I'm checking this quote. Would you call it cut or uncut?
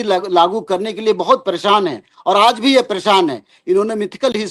uncut